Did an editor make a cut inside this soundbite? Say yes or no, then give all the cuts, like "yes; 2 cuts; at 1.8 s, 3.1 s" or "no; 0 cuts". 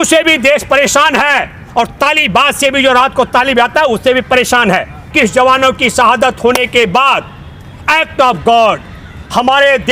yes; 1 cut; at 5.1 s